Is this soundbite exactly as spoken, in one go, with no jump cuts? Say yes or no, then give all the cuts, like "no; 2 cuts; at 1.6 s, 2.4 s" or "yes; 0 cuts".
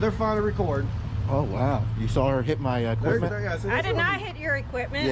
yes; 0 cuts